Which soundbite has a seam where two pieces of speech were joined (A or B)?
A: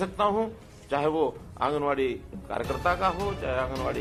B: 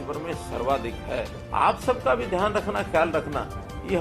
B